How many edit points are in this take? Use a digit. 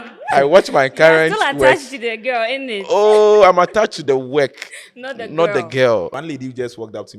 1